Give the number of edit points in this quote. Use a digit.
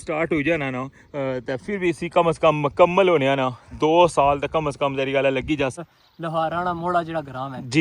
1